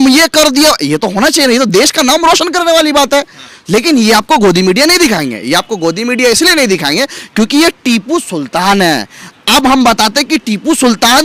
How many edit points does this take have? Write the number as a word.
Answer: zero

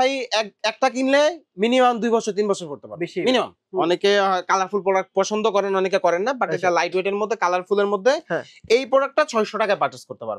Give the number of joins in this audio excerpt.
one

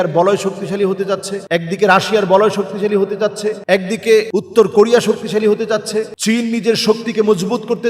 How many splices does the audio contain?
four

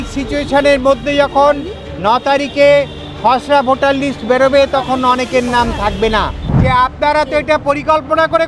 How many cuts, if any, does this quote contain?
one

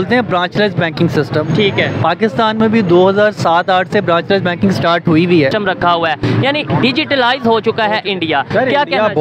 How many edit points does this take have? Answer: one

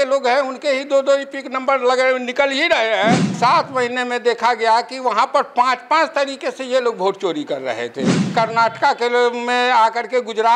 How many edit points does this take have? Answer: two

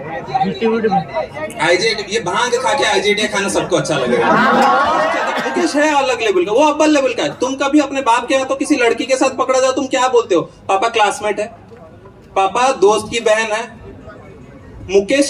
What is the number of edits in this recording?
one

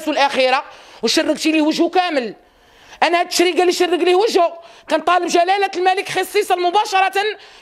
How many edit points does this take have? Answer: zero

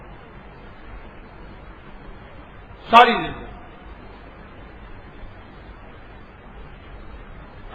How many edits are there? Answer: one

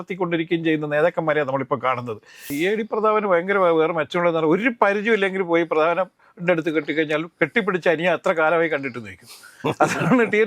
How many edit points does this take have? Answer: one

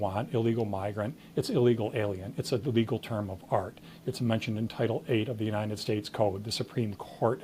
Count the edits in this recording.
zero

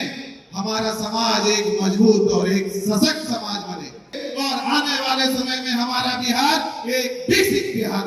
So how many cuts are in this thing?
one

